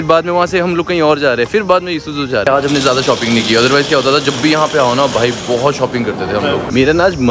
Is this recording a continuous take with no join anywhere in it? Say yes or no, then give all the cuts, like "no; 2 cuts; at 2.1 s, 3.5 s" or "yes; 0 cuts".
no; 2 cuts; at 2.4 s, 6.6 s